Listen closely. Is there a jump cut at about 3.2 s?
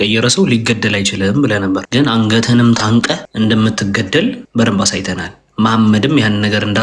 yes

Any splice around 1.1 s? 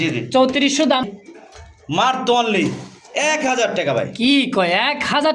yes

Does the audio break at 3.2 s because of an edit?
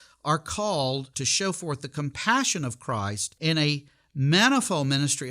yes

